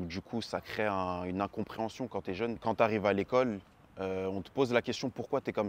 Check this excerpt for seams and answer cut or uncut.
cut